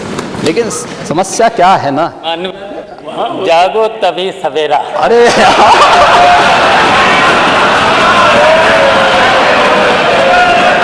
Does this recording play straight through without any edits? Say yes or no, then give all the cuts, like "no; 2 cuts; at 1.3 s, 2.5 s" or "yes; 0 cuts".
yes; 0 cuts